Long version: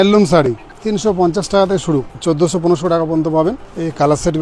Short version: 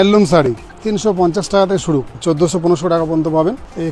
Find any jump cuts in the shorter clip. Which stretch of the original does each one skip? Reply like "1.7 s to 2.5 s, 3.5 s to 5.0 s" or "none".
none